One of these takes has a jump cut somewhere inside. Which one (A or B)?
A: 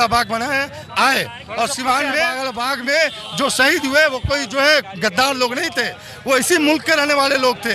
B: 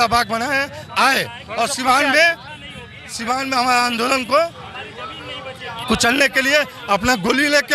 A